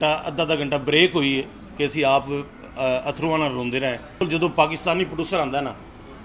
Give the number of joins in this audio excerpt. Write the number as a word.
one